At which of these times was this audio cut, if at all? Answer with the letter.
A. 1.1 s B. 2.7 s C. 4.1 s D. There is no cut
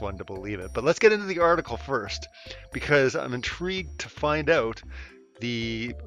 B